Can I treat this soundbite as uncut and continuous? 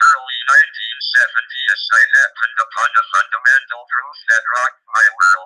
no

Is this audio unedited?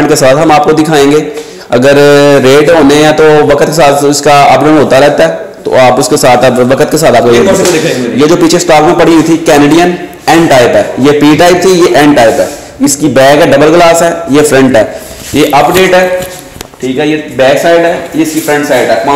yes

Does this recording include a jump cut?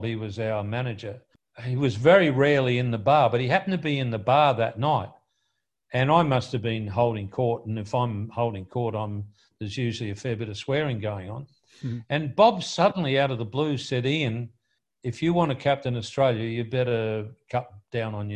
yes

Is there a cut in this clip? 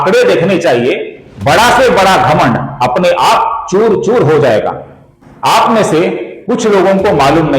yes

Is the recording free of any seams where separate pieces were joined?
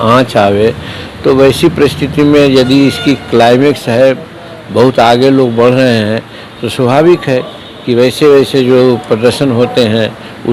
yes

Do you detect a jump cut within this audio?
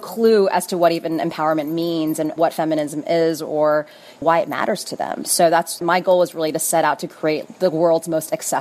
yes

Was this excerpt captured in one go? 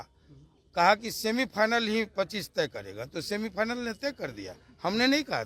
yes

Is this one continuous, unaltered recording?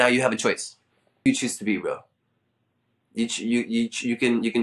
no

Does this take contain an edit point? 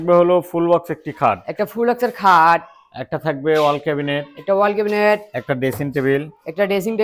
no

